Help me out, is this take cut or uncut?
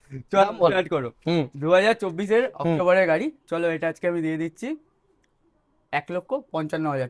uncut